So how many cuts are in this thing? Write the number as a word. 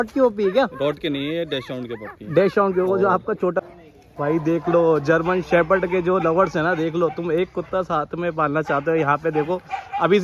one